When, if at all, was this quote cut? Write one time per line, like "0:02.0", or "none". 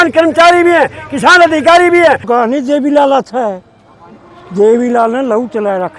0:02.2